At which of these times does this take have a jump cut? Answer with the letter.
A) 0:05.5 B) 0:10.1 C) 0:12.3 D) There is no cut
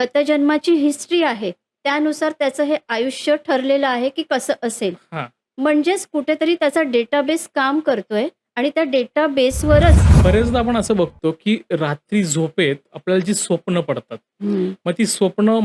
B